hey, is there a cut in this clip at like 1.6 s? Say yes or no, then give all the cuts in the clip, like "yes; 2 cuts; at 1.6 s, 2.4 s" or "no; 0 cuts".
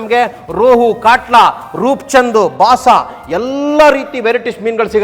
no; 0 cuts